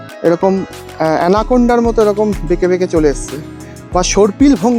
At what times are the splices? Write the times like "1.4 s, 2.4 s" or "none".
none